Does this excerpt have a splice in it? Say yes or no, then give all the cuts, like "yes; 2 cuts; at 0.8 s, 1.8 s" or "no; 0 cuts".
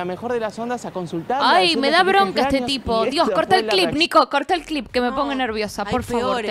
no; 0 cuts